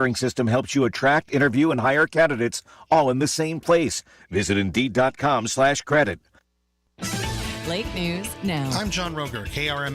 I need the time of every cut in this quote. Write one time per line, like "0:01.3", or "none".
0:06.8